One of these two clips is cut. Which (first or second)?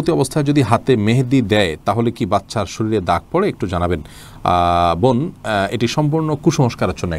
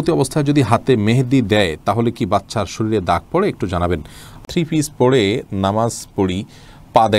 second